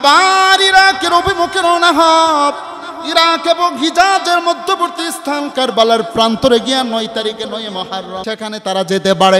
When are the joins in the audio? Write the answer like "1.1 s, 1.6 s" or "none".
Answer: 8.2 s